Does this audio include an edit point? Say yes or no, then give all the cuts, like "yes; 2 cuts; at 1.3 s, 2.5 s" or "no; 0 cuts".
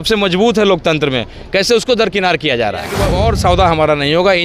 yes; 1 cut; at 3.0 s